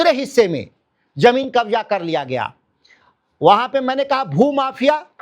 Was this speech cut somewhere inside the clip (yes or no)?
no